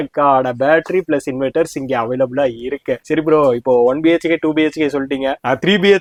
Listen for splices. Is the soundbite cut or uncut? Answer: uncut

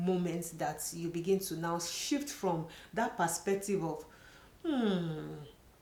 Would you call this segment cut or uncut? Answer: uncut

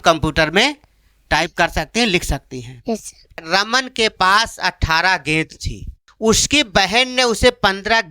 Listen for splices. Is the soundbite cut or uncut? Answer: cut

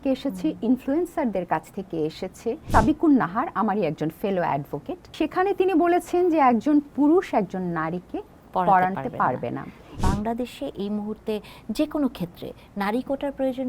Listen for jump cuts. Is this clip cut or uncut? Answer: cut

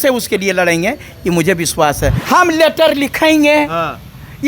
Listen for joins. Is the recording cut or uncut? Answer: cut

